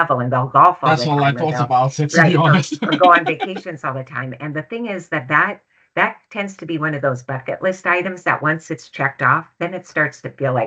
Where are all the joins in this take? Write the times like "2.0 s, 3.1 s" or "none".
none